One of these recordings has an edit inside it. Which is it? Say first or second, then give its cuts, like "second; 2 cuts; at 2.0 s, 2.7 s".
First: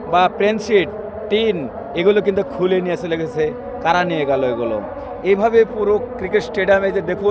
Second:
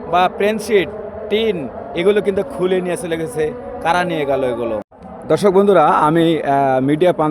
second; 1 cut; at 5.0 s